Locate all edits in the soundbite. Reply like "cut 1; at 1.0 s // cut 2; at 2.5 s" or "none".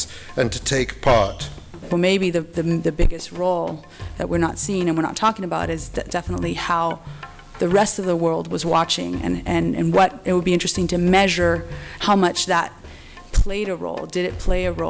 cut 1; at 1.8 s